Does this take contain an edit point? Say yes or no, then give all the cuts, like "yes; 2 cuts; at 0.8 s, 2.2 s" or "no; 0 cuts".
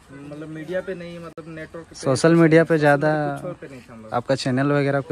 no; 0 cuts